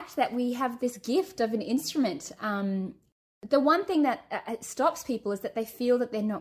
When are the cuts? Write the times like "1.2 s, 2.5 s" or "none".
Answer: 3.2 s